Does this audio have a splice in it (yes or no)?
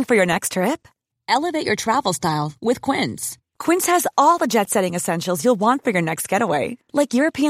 no